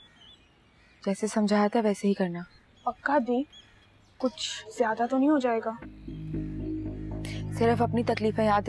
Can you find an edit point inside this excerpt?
no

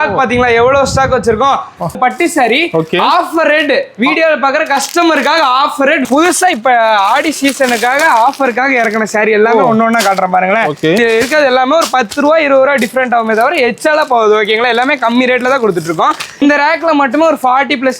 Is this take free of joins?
no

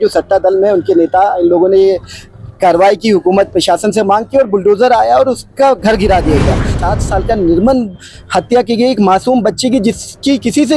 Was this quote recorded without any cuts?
no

